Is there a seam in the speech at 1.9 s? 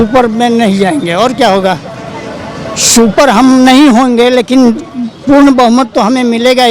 no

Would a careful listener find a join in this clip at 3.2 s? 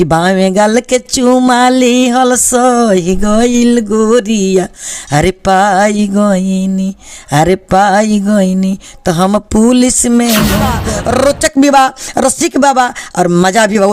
no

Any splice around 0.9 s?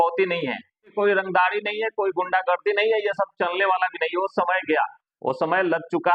yes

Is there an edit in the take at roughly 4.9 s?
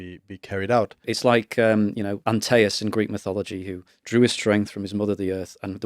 no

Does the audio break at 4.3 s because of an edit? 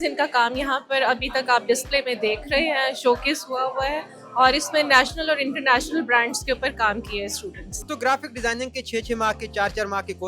no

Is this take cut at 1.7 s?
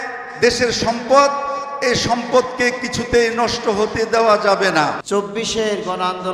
no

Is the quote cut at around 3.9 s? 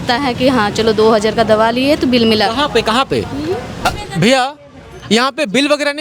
yes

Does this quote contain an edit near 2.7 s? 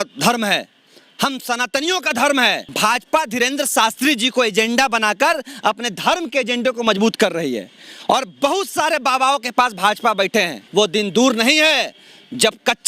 yes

